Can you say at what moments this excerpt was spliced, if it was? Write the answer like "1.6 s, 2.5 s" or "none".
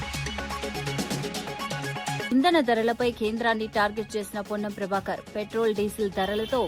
0.7 s, 2.3 s